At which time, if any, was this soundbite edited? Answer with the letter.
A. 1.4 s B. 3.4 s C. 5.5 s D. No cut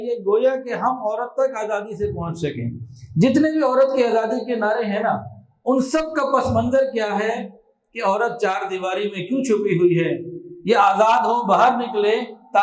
D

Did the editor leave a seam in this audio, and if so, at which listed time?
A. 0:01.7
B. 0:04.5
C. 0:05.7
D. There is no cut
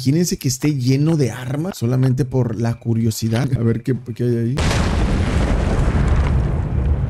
A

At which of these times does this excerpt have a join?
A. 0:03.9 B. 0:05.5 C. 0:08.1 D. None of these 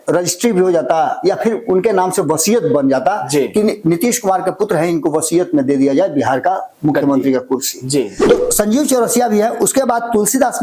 C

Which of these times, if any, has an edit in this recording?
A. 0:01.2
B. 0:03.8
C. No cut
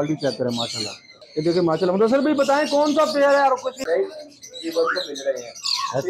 B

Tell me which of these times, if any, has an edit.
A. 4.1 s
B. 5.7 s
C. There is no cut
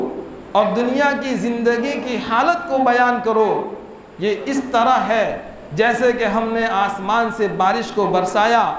C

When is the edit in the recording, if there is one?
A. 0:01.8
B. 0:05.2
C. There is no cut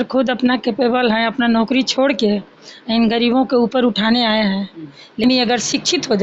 B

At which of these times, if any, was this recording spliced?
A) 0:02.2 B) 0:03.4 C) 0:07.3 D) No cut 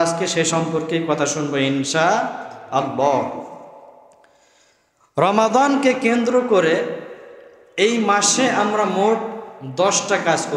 D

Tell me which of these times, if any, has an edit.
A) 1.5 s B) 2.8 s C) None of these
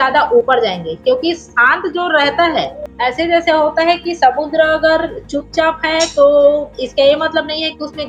B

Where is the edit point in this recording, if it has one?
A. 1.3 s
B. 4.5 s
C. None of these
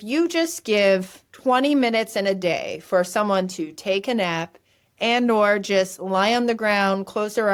C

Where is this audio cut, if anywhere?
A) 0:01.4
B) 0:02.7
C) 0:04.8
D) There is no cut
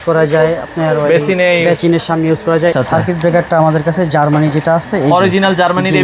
B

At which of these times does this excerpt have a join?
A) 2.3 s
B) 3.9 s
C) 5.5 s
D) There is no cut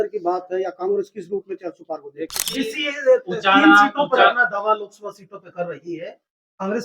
A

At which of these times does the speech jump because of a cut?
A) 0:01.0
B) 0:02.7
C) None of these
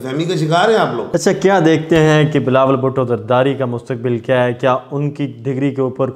A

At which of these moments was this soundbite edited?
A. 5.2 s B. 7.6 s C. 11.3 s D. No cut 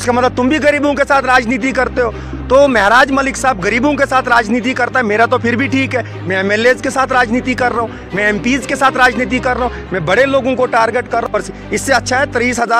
C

